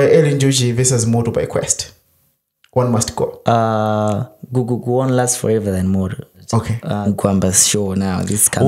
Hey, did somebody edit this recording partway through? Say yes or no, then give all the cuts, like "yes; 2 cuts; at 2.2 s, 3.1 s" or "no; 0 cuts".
yes; 1 cut; at 6.9 s